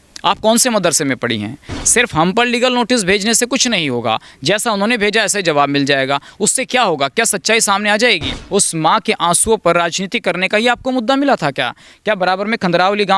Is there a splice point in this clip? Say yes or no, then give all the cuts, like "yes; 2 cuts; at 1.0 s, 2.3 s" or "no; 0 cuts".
yes; 2 cuts; at 1.7 s, 8.4 s